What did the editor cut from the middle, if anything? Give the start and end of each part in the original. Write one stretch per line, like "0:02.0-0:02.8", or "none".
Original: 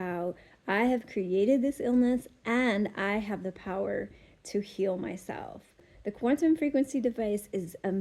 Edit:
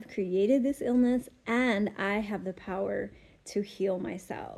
none